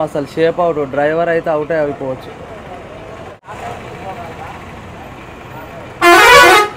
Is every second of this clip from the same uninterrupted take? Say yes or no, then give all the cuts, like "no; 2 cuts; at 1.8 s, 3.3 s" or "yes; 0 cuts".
no; 1 cut; at 3.6 s